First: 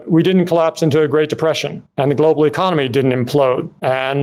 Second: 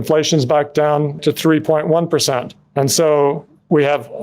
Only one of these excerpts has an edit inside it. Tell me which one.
second; 1 cut; at 1.2 s

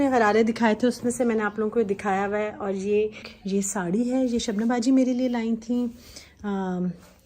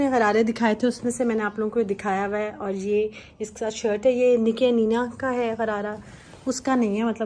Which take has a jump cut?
first; 1 cut; at 3.3 s

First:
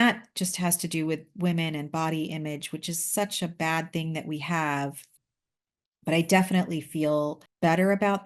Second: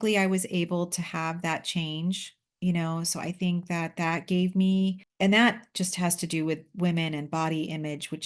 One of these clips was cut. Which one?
first; 1 cut; at 5.1 s

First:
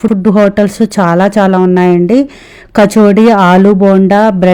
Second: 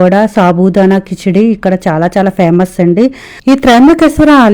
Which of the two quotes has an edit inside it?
second; 1 cut; at 3.3 s

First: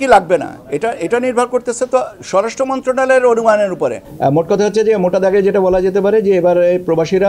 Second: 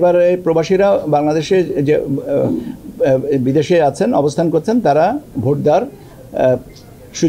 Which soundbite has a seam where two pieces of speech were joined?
first; 1 cut; at 4.1 s

